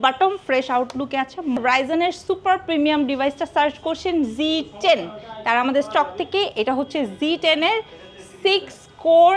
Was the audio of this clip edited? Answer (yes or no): yes